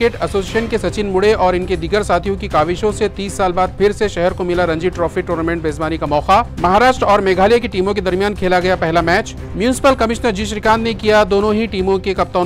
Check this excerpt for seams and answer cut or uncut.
uncut